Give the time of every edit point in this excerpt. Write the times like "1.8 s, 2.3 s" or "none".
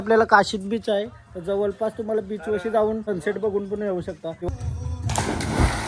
4.5 s